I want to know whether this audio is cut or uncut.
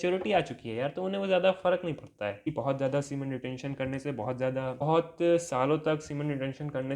cut